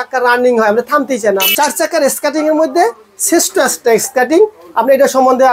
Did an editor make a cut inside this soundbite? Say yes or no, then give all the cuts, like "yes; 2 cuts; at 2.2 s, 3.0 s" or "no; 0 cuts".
yes; 1 cut; at 1.5 s